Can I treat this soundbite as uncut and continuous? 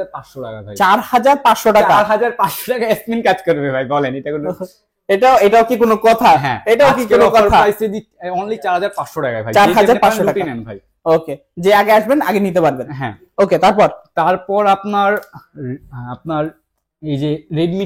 yes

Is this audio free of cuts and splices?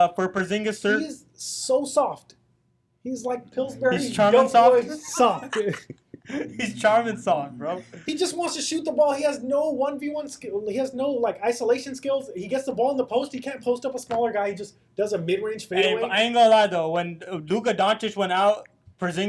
yes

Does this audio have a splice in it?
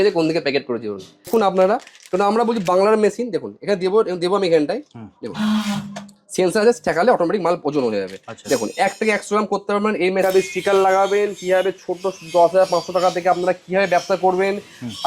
yes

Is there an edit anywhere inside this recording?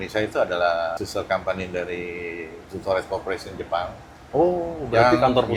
yes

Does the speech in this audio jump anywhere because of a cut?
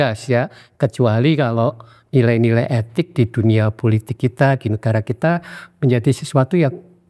no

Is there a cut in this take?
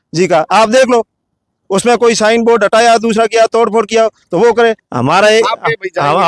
yes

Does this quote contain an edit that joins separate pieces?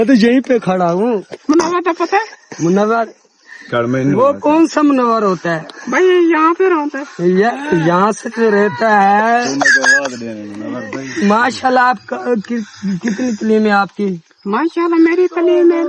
no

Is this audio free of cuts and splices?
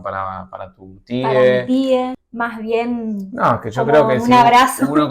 no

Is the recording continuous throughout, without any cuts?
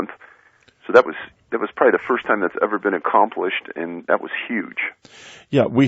no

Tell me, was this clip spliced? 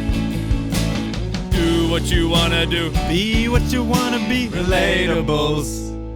no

